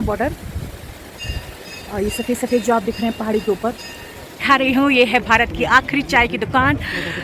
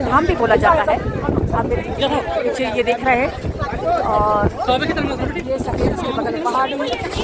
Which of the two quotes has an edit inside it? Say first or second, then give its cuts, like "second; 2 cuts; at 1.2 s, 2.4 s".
first; 1 cut; at 4.3 s